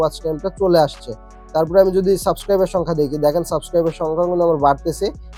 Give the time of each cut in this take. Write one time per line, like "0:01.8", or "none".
none